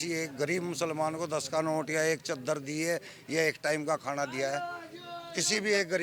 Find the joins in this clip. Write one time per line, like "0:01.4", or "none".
none